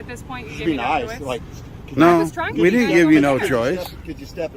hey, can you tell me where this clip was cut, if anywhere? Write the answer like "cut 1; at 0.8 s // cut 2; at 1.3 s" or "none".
none